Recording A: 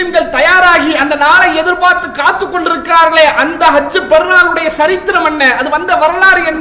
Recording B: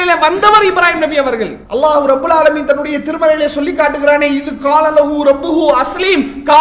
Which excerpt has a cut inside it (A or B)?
B